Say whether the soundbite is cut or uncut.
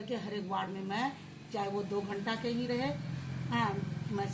uncut